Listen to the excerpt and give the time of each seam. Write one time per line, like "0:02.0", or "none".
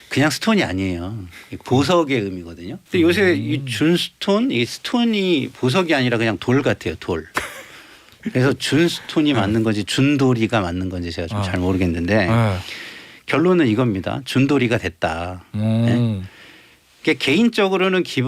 0:02.8